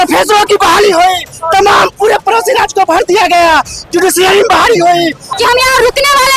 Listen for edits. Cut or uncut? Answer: cut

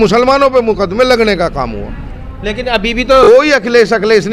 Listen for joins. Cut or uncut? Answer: uncut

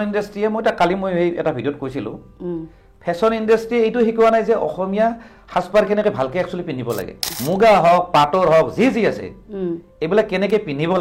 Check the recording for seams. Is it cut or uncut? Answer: cut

